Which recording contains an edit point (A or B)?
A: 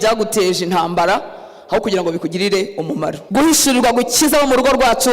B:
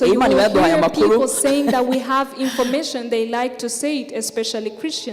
A